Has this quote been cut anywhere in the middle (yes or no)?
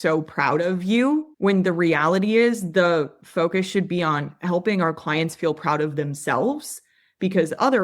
yes